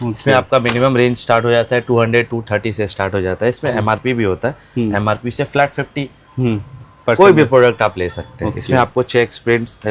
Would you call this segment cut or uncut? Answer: uncut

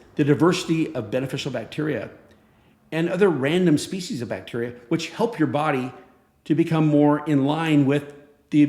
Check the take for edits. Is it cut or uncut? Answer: uncut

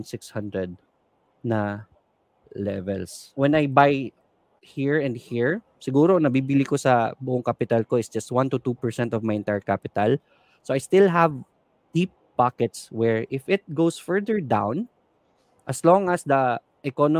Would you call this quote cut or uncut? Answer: cut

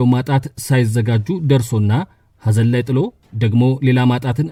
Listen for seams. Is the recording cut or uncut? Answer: uncut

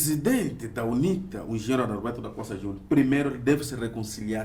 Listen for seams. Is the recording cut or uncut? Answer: uncut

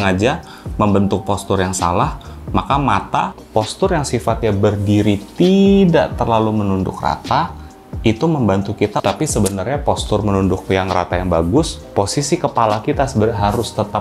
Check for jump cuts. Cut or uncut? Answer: cut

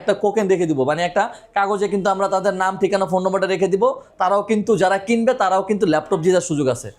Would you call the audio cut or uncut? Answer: uncut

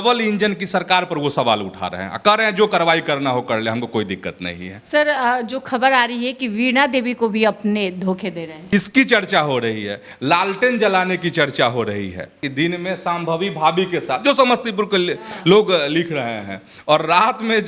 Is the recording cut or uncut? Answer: cut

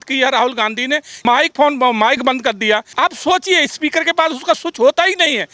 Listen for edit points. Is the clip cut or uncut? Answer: cut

